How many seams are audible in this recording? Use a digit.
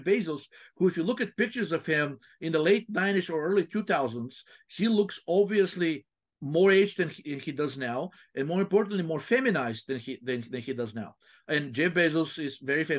0